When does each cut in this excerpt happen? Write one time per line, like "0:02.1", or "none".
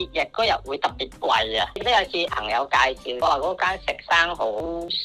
0:01.8